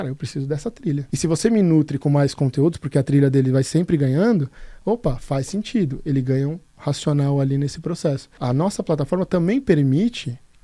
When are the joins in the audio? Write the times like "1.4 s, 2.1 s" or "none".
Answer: 1.1 s, 8.4 s